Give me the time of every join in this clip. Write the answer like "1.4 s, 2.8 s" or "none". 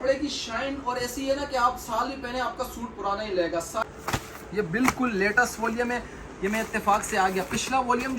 3.8 s